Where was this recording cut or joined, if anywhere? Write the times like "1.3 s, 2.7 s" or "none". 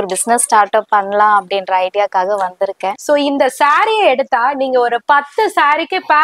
2.9 s